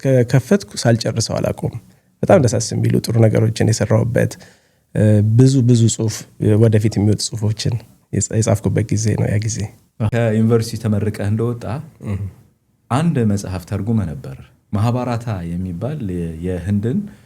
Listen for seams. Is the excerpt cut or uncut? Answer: cut